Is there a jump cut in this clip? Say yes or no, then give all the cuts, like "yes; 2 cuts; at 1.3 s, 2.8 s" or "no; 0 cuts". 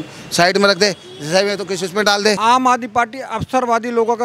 yes; 1 cut; at 2.4 s